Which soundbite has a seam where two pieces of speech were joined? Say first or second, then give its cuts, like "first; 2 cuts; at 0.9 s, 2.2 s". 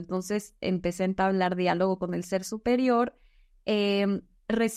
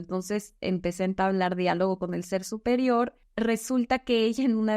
second; 1 cut; at 3.2 s